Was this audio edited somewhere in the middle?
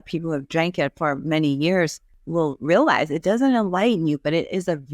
yes; 1 cut; at 2.1 s

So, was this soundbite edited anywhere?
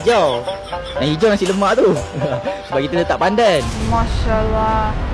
no; 0 cuts

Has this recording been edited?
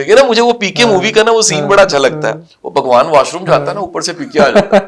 no; 0 cuts

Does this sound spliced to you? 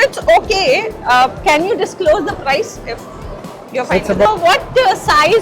yes; 1 cut; at 4.3 s

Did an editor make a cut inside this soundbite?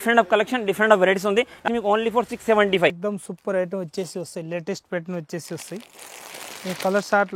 yes; 2 cuts; at 1.6 s, 3.0 s

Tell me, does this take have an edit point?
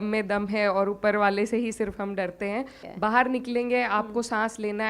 yes; 1 cut; at 2.8 s

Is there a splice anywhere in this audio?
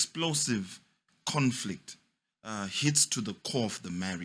no; 0 cuts

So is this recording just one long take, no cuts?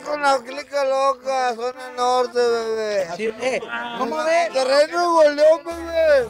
yes; 0 cuts

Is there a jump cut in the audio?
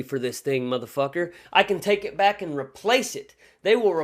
no; 0 cuts

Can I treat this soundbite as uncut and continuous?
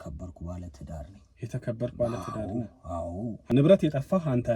no; 1 cut; at 3.5 s

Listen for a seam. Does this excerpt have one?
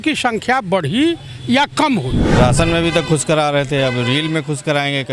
yes; 1 cut; at 2.2 s

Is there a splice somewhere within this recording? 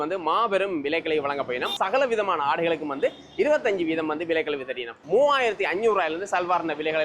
yes; 2 cuts; at 1.8 s, 4.9 s

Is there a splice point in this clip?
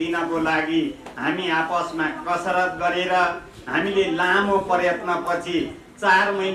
no; 0 cuts

